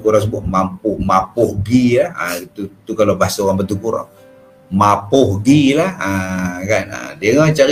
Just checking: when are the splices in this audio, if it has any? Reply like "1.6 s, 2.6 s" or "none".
none